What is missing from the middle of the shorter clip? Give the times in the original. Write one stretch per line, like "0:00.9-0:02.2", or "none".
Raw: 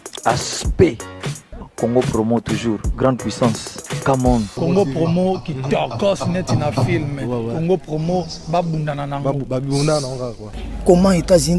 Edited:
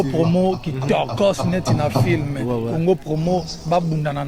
none